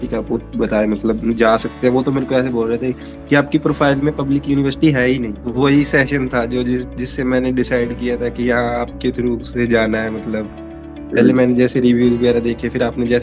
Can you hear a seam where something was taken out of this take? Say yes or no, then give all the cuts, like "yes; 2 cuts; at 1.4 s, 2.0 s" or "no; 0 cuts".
yes; 1 cut; at 5.4 s